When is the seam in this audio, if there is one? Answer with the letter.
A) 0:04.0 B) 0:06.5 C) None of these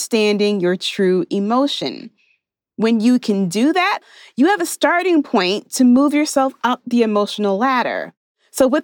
A